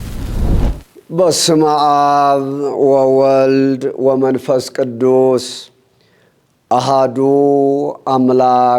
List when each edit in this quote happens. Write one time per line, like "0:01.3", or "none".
0:00.9